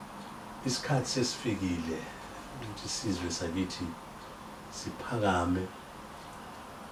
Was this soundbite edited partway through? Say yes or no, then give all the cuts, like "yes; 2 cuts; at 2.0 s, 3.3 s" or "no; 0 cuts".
no; 0 cuts